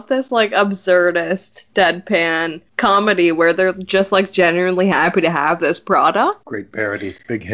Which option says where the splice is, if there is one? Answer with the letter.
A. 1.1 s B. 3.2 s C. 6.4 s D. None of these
C